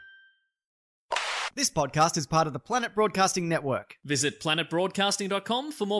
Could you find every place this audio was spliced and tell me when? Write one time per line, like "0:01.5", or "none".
0:01.3